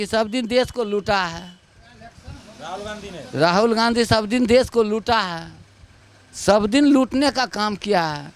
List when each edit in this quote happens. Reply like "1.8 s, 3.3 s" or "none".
none